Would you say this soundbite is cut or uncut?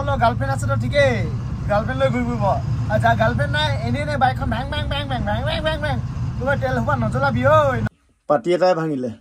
cut